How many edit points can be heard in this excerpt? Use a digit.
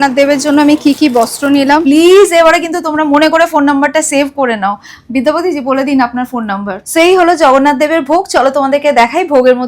2